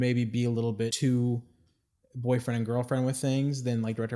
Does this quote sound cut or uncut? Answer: cut